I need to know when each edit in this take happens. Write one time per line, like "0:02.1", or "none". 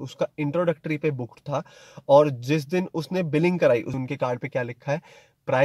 0:03.9